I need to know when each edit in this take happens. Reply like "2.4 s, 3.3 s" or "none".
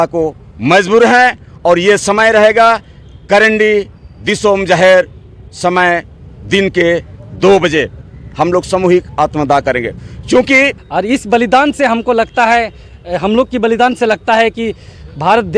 10.8 s